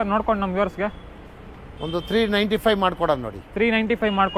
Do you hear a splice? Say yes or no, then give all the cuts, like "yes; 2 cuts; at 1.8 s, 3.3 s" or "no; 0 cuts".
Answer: no; 0 cuts